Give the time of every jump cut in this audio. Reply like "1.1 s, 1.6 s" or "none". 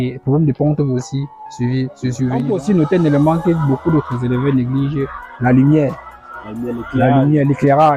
2.4 s